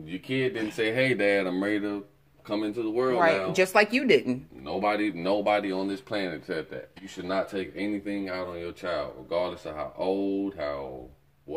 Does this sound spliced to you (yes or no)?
yes